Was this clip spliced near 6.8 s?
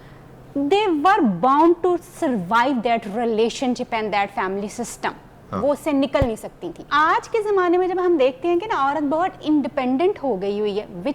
yes; 1 cut; at 6.8 s

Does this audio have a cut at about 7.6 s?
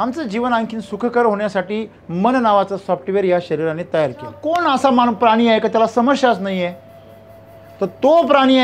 no; 1 cut; at 4.5 s

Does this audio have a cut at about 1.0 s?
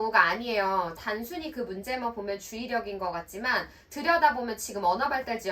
yes; 1 cut; at 1.0 s

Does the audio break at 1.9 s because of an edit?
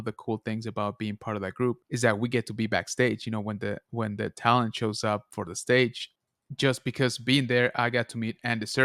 yes; 2 cuts; at 1.9 s, 6.1 s

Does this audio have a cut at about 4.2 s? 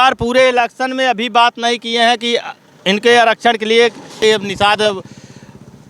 yes; 1 cut; at 4.2 s

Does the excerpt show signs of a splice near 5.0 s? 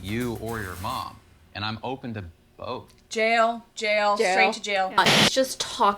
yes; 1 cut; at 5.0 s

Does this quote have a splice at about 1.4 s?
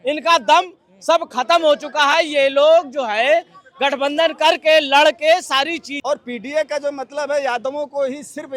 no; 1 cut; at 5.9 s

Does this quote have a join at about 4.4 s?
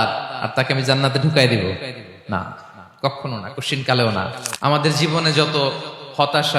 yes; 1 cut; at 4.4 s

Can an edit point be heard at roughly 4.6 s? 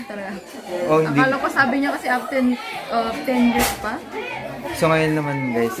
yes; 1 cut; at 4.6 s

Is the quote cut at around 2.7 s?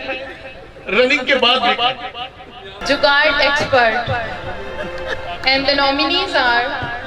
yes; 1 cut; at 2.7 s

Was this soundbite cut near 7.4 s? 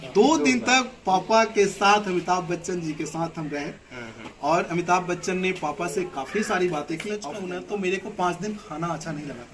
yes; 1 cut; at 7.4 s

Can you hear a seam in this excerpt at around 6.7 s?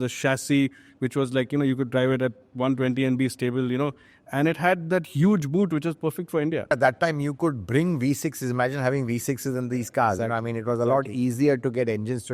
yes; 1 cut; at 6.7 s

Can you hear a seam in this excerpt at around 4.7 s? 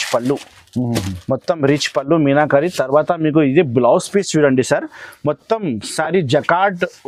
no; 0 cuts

